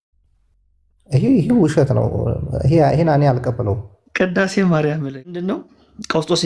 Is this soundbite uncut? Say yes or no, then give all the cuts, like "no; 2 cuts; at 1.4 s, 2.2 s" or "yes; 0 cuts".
no; 1 cut; at 5.6 s